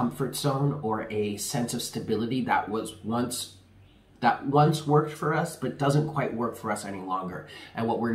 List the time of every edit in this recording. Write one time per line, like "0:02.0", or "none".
none